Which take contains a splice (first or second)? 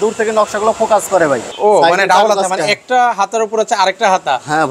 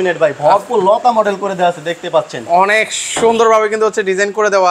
first